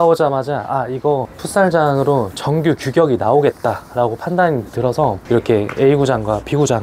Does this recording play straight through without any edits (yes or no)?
yes